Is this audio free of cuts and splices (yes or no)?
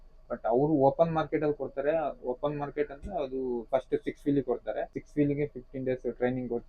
no